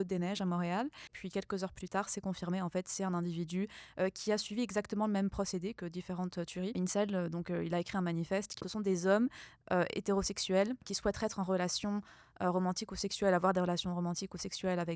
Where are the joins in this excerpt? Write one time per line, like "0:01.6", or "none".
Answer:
0:01.2
0:06.7
0:08.6
0:10.9